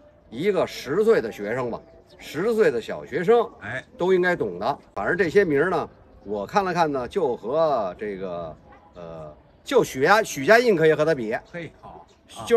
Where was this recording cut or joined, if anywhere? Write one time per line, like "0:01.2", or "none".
0:04.9